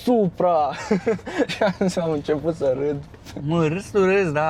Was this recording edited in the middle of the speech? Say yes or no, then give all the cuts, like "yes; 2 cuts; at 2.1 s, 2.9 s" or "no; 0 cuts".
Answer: no; 0 cuts